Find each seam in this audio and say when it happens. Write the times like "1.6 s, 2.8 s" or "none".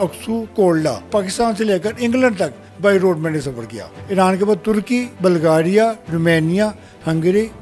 1.1 s, 4.0 s